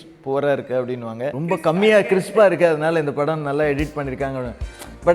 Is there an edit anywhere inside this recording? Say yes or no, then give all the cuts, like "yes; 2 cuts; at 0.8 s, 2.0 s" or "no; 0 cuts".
yes; 1 cut; at 1.4 s